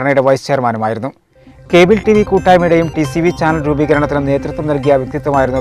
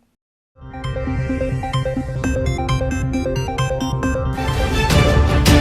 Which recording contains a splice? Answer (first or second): second